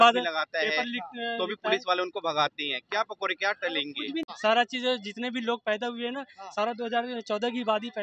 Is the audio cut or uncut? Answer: cut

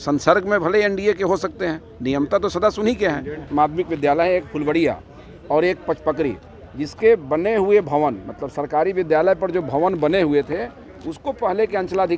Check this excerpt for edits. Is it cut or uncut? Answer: cut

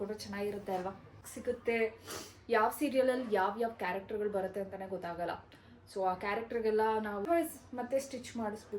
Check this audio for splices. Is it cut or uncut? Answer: cut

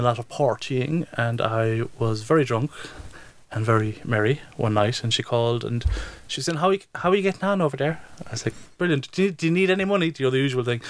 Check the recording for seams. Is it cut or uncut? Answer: uncut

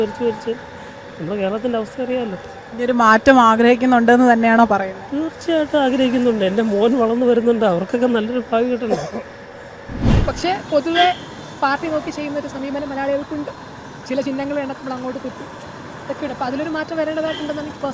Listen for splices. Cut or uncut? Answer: cut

